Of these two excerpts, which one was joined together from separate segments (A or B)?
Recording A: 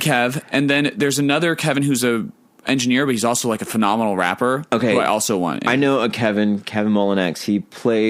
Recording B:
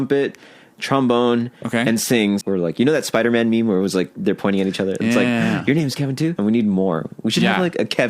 B